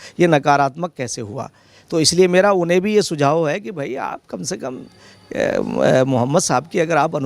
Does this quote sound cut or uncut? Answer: uncut